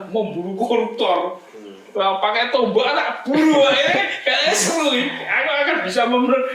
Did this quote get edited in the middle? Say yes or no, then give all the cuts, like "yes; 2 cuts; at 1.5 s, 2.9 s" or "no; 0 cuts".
no; 0 cuts